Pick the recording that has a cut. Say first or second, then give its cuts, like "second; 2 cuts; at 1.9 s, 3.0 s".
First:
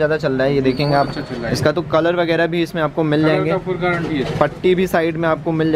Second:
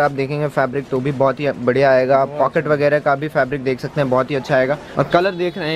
second; 1 cut; at 4.9 s